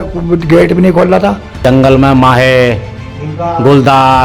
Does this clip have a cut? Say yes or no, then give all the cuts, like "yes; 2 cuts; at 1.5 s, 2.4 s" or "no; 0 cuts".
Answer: yes; 1 cut; at 1.6 s